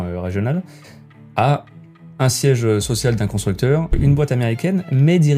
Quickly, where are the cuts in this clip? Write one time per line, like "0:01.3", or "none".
0:04.0